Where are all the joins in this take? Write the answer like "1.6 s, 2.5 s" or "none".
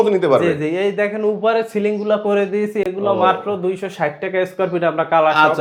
none